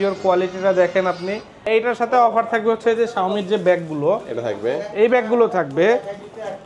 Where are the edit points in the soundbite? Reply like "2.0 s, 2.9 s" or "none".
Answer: 1.7 s